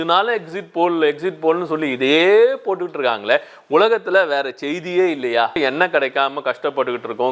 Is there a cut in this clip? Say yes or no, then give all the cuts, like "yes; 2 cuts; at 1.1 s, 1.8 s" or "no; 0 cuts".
yes; 1 cut; at 5.6 s